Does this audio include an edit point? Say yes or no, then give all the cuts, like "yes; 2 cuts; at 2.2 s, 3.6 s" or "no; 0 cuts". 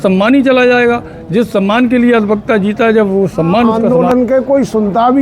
yes; 1 cut; at 3.8 s